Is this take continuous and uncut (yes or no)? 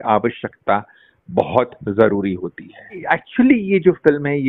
no